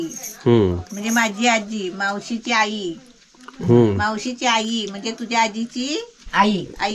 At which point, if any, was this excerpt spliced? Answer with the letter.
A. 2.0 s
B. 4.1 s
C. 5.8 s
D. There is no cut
D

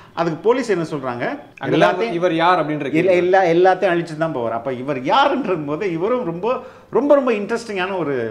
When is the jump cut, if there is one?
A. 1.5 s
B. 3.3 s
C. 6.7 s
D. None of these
A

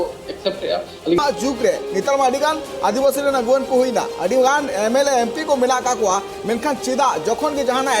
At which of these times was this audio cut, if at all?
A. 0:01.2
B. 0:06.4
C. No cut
A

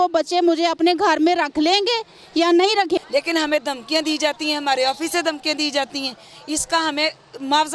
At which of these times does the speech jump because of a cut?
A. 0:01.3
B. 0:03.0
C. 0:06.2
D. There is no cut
B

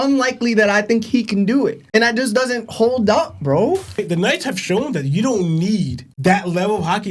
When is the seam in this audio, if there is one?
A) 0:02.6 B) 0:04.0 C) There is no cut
B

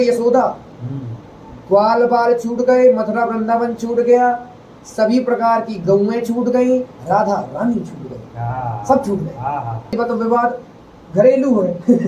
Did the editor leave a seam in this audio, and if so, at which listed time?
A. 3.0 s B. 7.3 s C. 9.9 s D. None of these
C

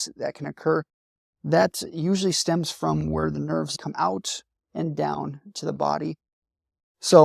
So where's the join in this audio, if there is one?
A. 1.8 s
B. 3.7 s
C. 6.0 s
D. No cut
B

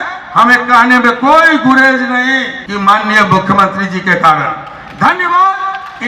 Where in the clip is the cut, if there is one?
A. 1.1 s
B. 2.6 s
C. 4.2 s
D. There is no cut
B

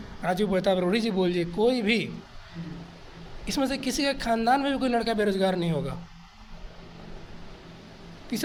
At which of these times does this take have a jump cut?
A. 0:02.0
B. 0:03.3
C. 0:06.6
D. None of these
D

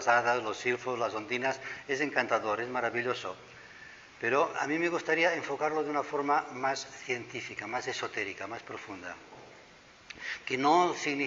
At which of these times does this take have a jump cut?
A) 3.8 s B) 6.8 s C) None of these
B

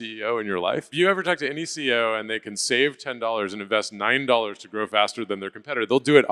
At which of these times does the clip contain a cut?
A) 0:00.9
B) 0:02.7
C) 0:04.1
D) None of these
A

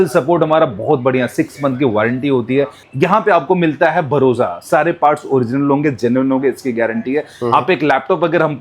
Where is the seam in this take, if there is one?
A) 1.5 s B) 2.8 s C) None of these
B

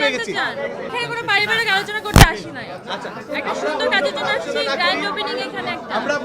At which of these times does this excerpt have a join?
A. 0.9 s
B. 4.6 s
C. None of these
A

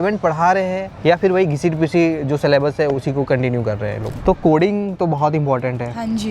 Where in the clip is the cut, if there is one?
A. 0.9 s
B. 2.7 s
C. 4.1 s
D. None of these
C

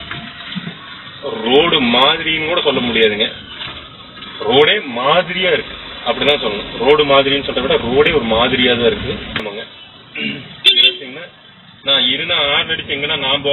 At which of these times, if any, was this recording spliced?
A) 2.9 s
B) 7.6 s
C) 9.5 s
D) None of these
C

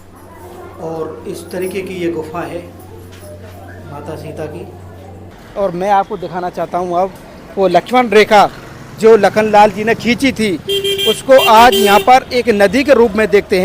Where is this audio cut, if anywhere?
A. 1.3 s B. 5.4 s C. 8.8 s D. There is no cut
B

